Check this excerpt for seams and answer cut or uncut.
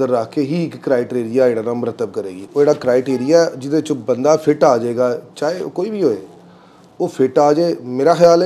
uncut